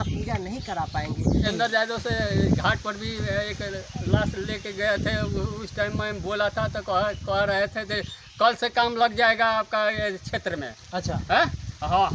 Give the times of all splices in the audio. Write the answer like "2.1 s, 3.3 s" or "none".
1.5 s